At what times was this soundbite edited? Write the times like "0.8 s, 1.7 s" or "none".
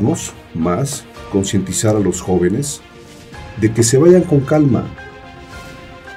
none